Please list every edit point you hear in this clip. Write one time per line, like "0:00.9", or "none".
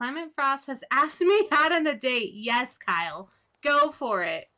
none